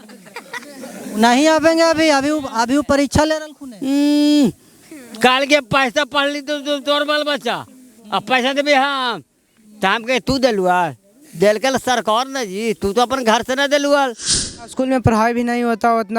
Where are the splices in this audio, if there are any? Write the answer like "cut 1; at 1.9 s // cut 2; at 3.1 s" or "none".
cut 1; at 14.7 s

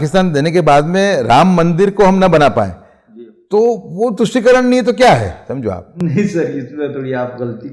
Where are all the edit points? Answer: none

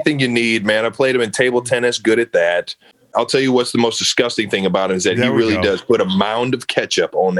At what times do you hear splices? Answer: cut 1; at 3.1 s

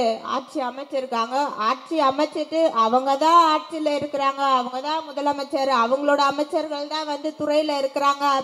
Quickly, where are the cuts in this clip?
none

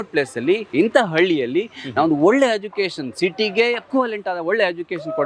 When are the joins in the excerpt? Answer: cut 1; at 3.9 s

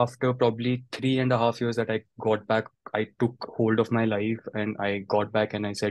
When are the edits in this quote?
none

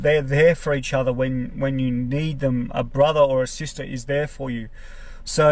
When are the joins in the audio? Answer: none

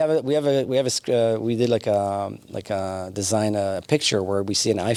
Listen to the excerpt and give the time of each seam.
none

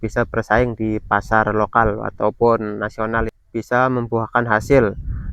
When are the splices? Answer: cut 1; at 3.2 s

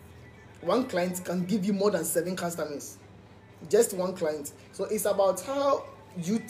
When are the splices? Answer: none

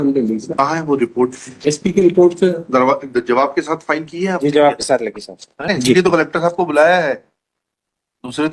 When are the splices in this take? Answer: cut 1; at 5.7 s

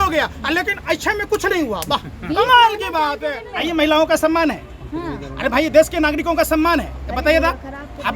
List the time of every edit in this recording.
cut 1; at 3.5 s

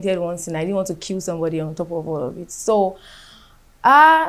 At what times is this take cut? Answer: none

